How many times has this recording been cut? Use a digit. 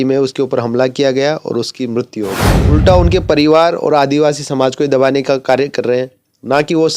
1